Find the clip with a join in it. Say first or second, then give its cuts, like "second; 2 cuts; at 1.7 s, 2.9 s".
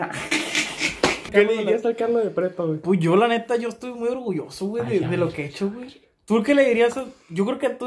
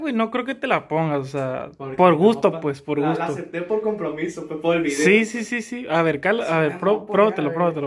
first; 1 cut; at 1.3 s